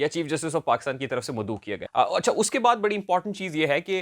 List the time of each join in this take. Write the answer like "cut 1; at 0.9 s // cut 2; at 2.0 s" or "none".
cut 1; at 1.8 s